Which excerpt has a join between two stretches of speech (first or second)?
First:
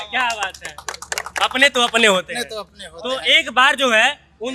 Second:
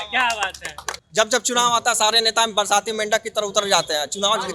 second